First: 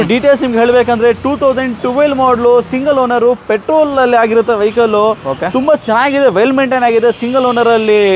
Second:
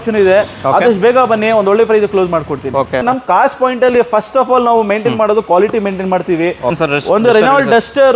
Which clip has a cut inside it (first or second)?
second